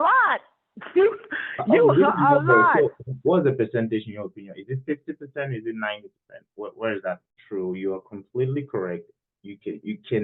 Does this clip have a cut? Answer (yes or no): yes